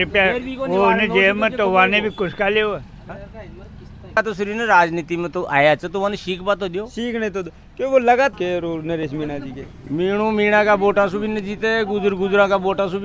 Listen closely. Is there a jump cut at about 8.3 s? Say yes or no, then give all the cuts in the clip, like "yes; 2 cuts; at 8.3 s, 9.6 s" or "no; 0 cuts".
yes; 2 cuts; at 4.2 s, 8.3 s